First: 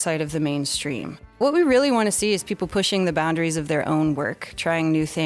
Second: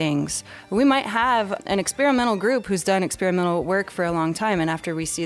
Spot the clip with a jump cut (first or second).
first